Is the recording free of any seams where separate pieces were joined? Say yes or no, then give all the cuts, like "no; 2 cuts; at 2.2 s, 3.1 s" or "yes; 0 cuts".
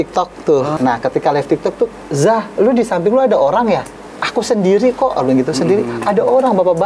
no; 2 cuts; at 0.7 s, 1.9 s